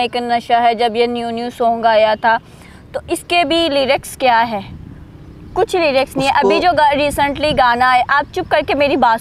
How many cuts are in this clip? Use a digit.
0